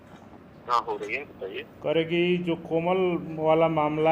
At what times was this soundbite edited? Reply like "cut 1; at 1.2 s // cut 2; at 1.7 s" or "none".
cut 1; at 1.7 s